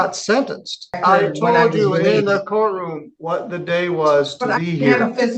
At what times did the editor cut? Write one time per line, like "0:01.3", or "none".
0:01.0